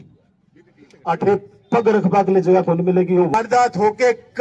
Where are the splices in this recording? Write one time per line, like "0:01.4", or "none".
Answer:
0:03.3